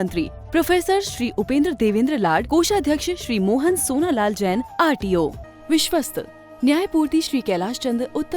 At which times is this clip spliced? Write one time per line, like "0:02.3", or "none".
0:05.4